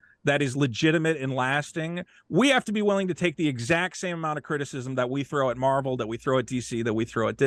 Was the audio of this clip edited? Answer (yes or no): no